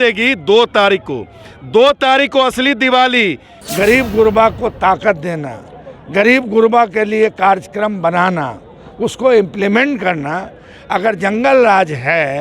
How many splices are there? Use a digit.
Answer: 1